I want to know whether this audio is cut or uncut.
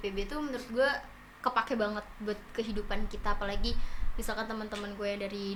uncut